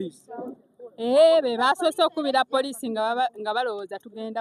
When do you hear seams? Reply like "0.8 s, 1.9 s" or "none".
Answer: none